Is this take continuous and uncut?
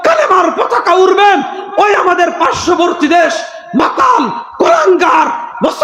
yes; 0 cuts

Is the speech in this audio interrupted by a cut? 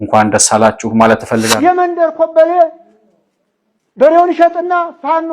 yes; 1 cut; at 1.5 s

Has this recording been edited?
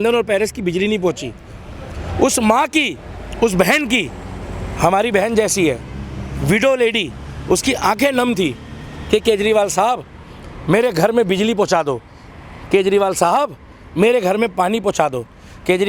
no; 0 cuts

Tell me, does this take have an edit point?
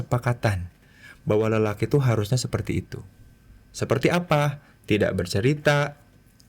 no; 0 cuts

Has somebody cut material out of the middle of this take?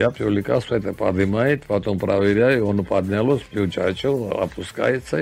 no; 0 cuts

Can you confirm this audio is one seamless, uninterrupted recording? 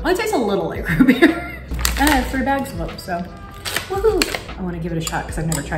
no; 2 cuts; at 1.7 s, 4.5 s

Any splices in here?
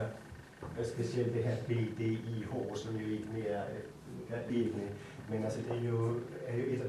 yes; 1 cut; at 4.5 s

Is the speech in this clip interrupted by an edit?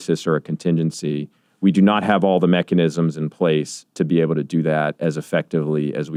no; 0 cuts

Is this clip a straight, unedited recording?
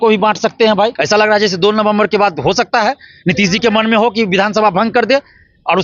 no; 1 cut; at 1.0 s

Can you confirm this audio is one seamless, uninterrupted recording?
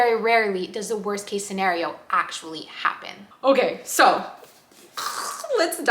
no; 1 cut; at 3.1 s

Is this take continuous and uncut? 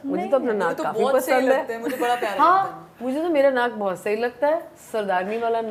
yes; 0 cuts

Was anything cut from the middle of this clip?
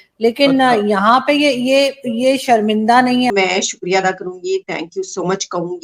yes; 1 cut; at 3.3 s

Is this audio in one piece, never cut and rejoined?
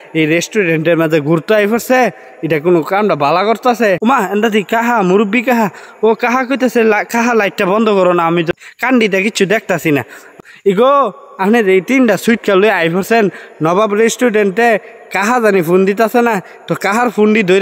no; 3 cuts; at 4.0 s, 8.5 s, 10.3 s

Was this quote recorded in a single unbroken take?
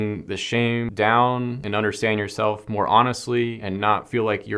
no; 3 cuts; at 0.9 s, 1.6 s, 3.6 s

